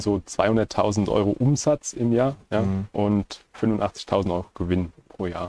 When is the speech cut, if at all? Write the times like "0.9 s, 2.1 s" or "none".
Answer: none